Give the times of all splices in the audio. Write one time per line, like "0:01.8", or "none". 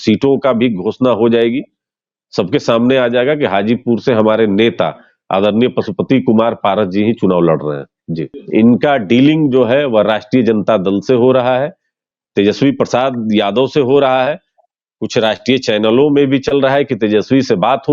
0:08.3